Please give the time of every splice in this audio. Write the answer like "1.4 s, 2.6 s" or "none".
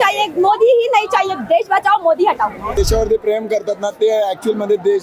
2.7 s